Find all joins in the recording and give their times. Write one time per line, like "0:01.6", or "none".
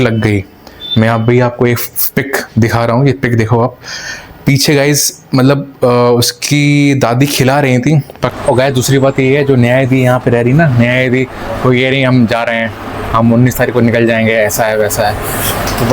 0:08.3

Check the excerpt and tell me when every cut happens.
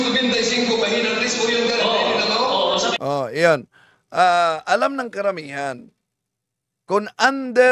0:02.9

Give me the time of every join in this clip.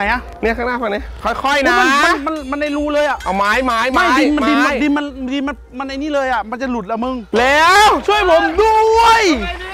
none

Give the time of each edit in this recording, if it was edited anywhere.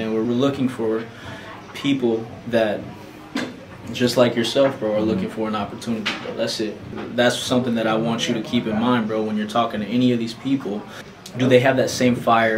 none

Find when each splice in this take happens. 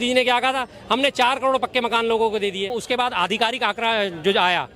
0:02.8

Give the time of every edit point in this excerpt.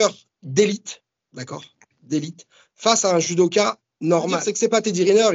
0:04.4

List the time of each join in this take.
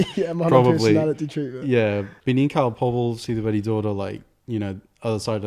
0:02.1

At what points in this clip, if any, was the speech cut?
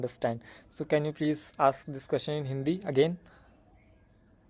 none

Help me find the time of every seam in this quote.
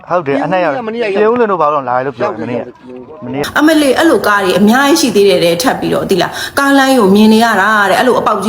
0:03.4
0:05.3

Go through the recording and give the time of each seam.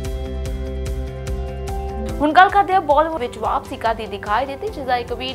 0:03.2

